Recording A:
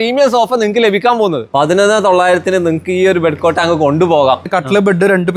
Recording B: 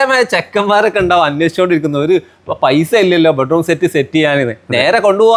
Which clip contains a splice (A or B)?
A